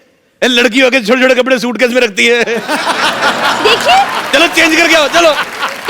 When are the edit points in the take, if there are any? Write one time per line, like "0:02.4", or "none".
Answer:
none